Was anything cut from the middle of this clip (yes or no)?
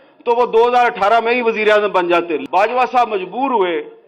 yes